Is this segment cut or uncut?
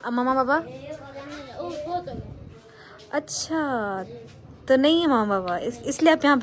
uncut